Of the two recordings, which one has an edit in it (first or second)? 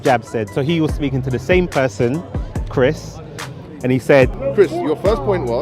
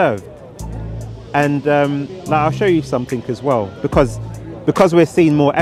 first